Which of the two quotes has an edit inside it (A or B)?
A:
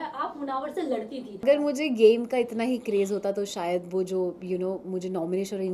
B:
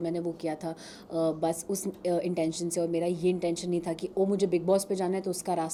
A